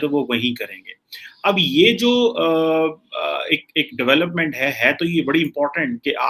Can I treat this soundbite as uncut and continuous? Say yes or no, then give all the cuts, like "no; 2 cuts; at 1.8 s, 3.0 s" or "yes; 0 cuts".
yes; 0 cuts